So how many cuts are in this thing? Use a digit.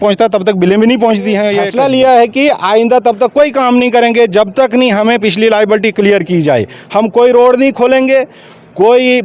1